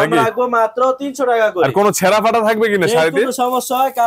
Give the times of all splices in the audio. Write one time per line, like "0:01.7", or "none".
none